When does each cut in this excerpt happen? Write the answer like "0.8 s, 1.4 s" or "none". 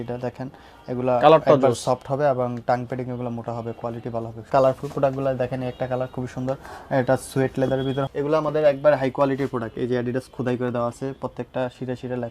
4.5 s, 8.0 s